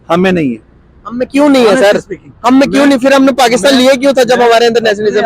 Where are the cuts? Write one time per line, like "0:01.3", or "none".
none

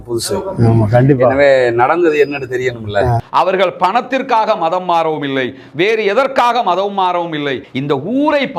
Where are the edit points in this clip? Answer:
0:03.2
0:07.6

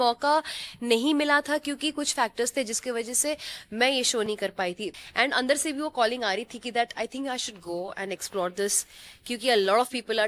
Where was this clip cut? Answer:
0:04.9

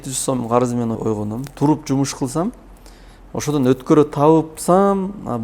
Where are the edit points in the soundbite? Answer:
0:01.0

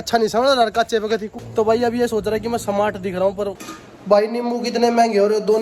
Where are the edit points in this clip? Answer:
0:01.4
0:03.6

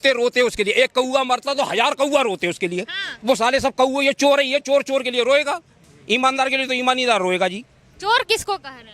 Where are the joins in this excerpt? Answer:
none

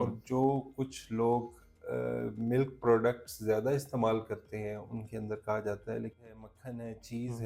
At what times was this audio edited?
0:06.2

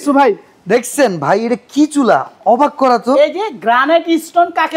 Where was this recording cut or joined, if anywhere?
none

